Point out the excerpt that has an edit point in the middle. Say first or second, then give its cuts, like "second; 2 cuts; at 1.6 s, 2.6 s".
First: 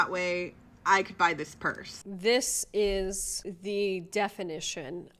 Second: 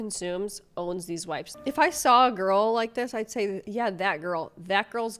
second; 2 cuts; at 1.5 s, 3.6 s